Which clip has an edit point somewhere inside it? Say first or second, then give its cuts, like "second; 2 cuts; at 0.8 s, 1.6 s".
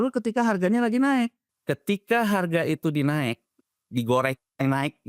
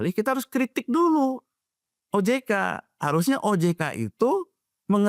first; 1 cut; at 1.5 s